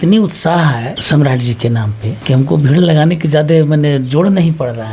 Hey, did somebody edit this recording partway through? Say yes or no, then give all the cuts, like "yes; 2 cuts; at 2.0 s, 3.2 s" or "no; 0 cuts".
yes; 2 cuts; at 1.0 s, 2.1 s